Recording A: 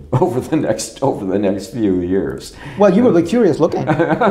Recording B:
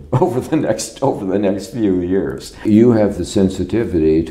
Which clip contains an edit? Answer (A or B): B